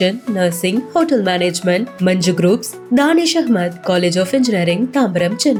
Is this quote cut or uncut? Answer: uncut